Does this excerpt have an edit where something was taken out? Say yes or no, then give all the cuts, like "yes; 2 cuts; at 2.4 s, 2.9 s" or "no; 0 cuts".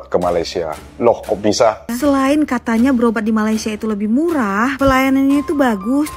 yes; 1 cut; at 1.9 s